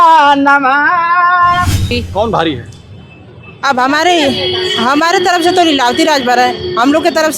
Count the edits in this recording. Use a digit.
1